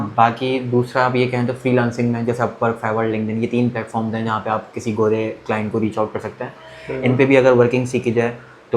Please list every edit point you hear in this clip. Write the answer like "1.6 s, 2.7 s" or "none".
none